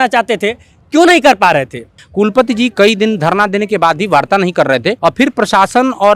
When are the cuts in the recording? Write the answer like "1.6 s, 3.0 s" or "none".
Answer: 2.0 s, 5.0 s

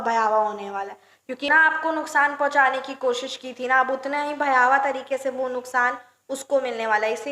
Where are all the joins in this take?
1.4 s

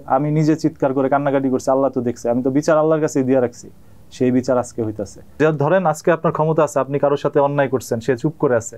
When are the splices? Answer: 5.3 s

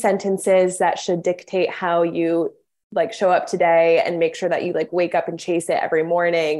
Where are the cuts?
none

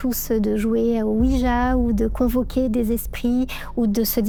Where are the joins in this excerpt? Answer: none

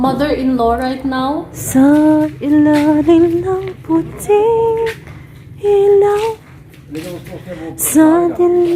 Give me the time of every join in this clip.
1.6 s

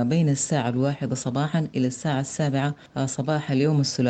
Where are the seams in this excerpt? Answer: 2.8 s

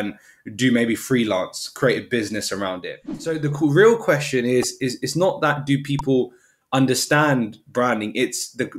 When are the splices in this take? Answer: 3.4 s

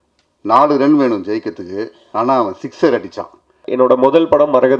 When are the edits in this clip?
3.6 s

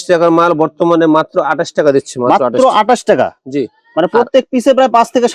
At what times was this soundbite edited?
none

